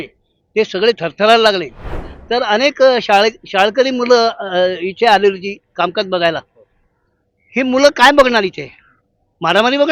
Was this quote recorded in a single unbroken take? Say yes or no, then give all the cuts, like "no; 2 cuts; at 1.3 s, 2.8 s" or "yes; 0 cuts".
no; 1 cut; at 2.0 s